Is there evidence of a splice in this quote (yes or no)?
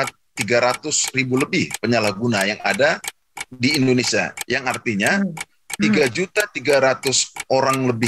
no